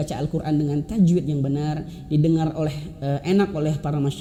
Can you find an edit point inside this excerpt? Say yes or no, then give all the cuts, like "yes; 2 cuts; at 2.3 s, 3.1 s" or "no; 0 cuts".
no; 0 cuts